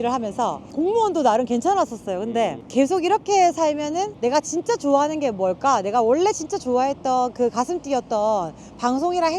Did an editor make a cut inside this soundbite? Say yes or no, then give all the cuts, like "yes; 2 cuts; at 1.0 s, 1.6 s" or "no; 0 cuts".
no; 0 cuts